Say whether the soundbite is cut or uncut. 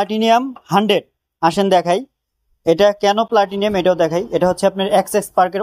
uncut